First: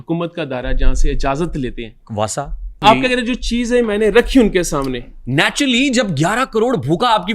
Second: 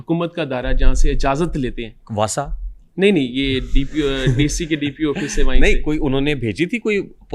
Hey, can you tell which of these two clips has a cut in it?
first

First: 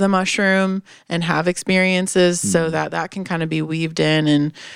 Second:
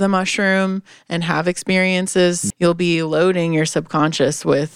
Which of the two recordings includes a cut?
second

